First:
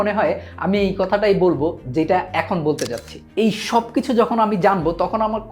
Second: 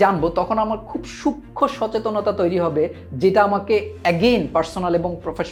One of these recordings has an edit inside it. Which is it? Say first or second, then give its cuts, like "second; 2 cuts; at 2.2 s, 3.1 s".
first; 1 cut; at 3.3 s